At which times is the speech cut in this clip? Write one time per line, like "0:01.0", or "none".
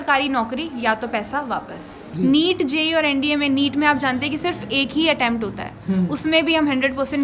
0:02.0